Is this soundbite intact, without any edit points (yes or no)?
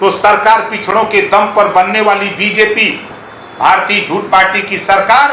yes